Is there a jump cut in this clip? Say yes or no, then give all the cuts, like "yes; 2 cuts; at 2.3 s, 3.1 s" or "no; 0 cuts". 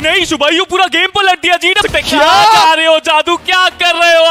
yes; 1 cut; at 1.8 s